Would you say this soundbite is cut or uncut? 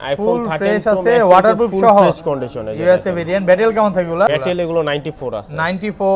cut